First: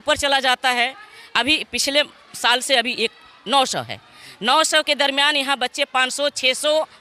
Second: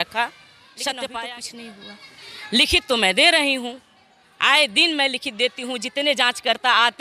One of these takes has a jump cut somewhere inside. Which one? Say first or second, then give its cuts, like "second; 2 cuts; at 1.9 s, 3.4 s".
second; 1 cut; at 1.3 s